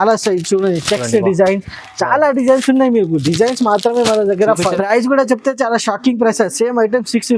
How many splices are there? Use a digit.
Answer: 1